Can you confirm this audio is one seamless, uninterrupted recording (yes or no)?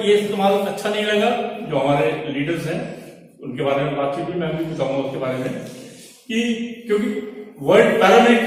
yes